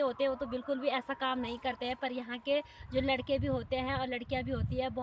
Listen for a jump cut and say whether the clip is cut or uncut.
uncut